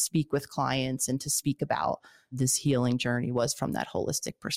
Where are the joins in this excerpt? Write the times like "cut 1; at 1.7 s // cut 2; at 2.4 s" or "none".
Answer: cut 1; at 2.4 s

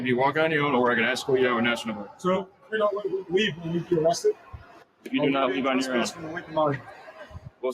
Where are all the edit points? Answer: cut 1; at 5.1 s

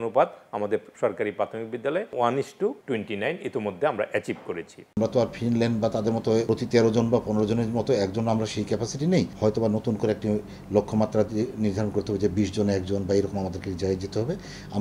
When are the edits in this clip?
cut 1; at 2.1 s // cut 2; at 2.8 s // cut 3; at 4.8 s // cut 4; at 6.4 s // cut 5; at 9.3 s

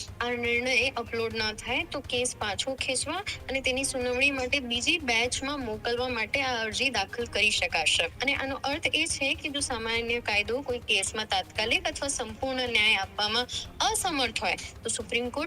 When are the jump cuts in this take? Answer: cut 1; at 8.1 s

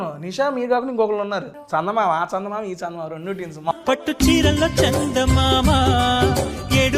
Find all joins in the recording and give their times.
cut 1; at 1.6 s // cut 2; at 3.7 s

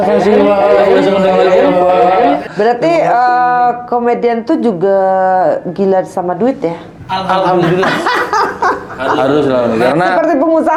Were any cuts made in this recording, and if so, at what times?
none

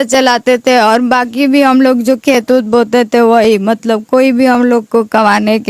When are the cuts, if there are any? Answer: none

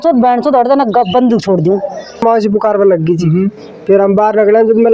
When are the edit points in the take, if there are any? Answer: cut 1; at 2.2 s

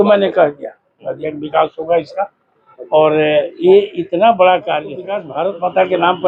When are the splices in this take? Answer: cut 1; at 5.2 s

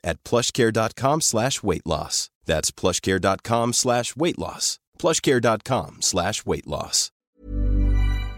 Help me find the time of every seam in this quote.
cut 1; at 7.3 s

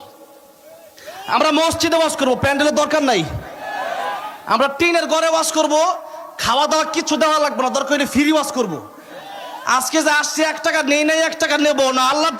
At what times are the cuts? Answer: none

